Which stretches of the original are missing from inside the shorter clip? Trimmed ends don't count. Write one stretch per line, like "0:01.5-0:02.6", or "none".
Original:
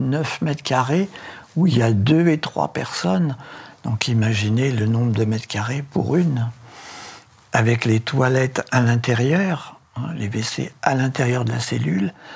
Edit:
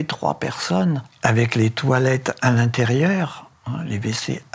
0:03.4-0:07.4